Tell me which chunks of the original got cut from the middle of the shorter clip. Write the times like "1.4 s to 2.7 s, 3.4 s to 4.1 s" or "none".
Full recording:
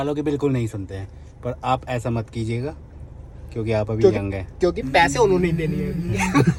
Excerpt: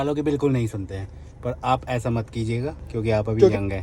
2.8 s to 3.4 s